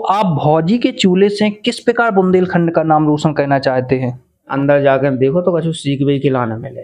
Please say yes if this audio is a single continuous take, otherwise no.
no